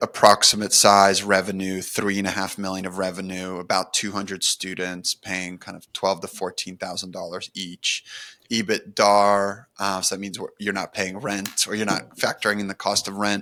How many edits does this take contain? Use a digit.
0